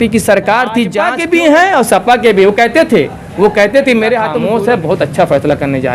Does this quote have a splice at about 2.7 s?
no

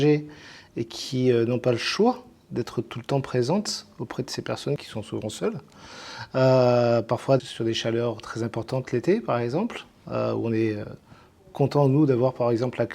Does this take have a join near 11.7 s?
no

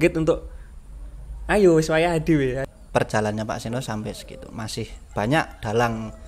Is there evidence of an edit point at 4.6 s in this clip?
no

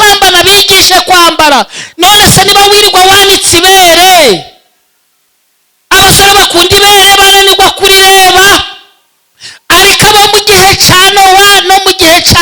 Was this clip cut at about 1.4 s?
no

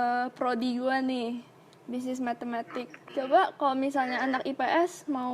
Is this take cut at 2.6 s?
yes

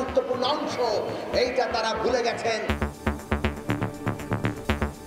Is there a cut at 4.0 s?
no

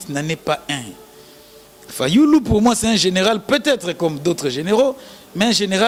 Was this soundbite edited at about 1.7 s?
no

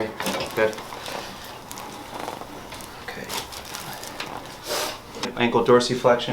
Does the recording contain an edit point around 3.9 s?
no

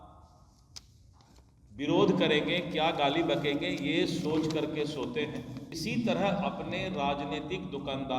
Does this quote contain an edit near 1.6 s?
no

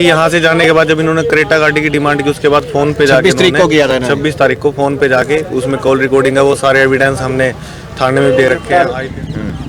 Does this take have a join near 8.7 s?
yes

